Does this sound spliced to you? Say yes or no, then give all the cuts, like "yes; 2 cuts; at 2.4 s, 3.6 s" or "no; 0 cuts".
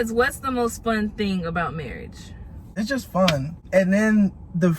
yes; 2 cuts; at 2.7 s, 3.5 s